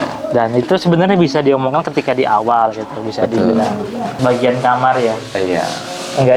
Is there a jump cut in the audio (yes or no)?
yes